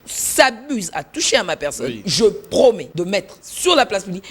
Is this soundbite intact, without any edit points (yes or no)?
no